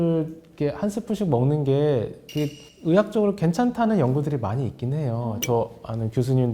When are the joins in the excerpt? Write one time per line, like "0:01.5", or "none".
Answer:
0:05.4